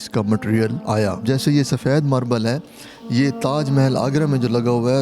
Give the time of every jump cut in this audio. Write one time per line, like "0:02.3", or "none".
0:01.1